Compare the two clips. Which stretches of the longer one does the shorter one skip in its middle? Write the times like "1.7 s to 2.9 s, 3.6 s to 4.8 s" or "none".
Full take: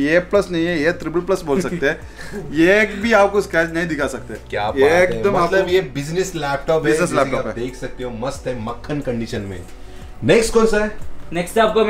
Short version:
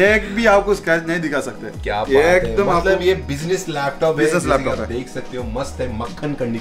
none